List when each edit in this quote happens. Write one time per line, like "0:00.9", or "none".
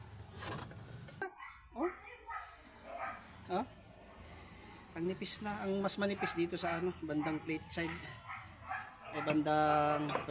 0:01.4